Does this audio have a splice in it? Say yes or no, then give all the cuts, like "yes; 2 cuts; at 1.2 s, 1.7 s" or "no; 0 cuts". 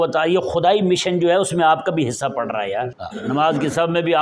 yes; 1 cut; at 3.0 s